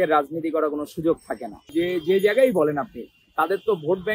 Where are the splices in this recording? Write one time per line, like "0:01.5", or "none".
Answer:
0:01.7

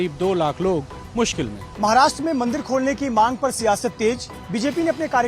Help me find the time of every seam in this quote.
0:01.6

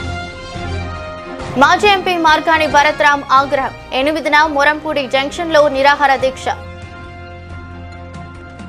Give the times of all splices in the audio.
0:01.5

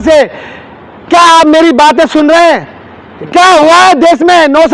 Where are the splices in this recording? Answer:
none

